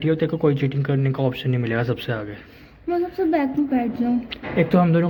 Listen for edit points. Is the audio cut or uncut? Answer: uncut